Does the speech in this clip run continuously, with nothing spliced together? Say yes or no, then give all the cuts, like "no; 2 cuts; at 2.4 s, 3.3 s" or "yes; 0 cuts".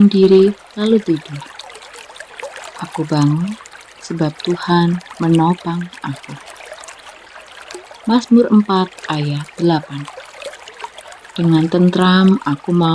yes; 0 cuts